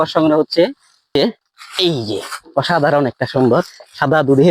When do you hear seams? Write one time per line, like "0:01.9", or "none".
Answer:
0:01.2